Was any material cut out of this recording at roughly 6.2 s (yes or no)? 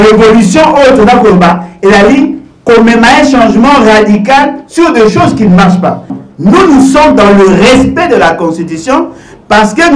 yes